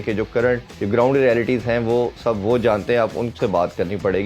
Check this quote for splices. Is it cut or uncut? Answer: uncut